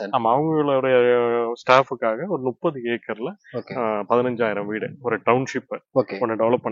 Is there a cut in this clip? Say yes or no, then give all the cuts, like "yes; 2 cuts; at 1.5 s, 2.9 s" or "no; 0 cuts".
no; 0 cuts